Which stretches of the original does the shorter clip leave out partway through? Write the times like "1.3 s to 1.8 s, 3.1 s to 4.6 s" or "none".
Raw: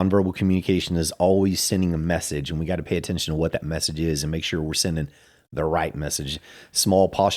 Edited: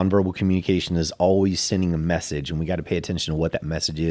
none